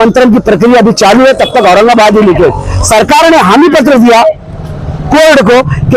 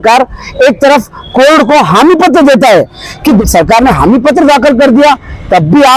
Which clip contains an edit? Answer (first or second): second